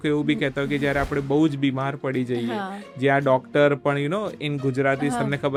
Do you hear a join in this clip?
no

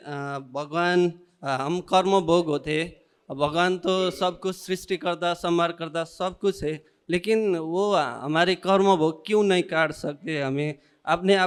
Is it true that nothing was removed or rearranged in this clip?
yes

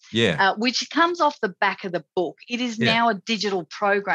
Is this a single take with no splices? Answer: yes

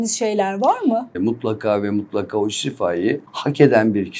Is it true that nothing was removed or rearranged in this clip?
no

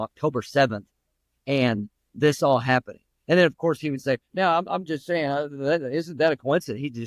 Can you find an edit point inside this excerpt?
no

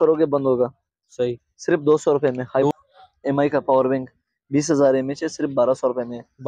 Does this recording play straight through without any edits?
no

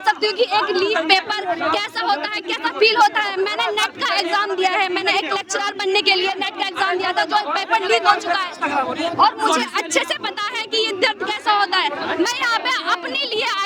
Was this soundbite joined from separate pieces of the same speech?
no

